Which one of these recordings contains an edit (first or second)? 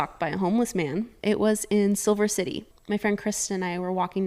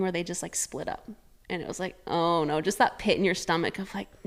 first